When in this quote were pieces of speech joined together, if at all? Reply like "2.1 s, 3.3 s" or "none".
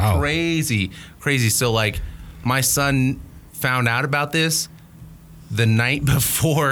none